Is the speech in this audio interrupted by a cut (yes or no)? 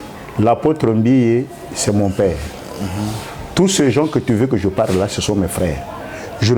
no